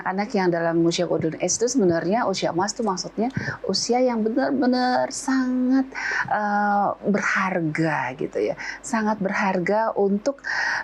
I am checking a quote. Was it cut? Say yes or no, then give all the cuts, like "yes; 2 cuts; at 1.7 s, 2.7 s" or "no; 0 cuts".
no; 0 cuts